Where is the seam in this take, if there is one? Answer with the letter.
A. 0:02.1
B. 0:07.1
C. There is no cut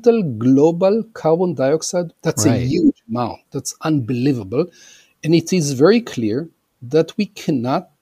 A